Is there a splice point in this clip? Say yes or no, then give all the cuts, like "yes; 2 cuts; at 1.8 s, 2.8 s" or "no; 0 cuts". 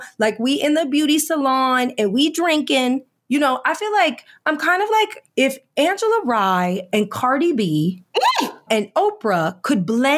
yes; 2 cuts; at 5.2 s, 8.6 s